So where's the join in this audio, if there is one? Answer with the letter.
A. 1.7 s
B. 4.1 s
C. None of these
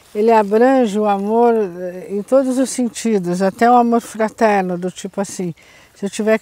C